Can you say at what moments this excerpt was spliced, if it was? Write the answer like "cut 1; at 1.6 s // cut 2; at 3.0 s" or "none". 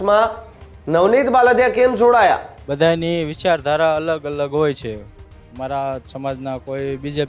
cut 1; at 2.6 s